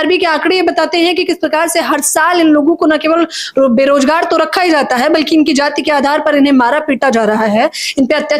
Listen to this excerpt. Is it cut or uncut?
uncut